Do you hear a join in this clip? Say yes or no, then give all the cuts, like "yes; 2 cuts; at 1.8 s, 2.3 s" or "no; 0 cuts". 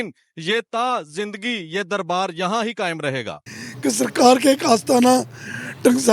yes; 1 cut; at 3.4 s